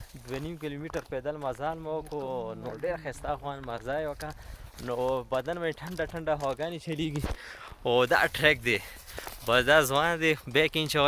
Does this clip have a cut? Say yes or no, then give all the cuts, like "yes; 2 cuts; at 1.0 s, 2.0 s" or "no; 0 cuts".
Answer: no; 0 cuts